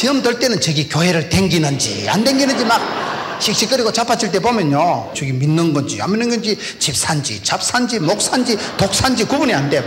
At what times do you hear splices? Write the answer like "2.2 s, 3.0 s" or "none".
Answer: 5.2 s